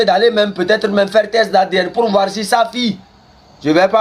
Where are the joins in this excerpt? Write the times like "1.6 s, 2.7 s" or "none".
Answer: none